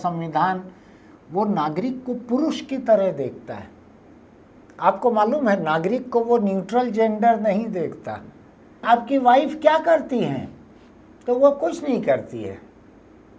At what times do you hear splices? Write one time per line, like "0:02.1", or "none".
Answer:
0:08.8